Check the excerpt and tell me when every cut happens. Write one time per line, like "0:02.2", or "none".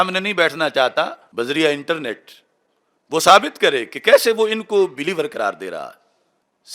0:01.2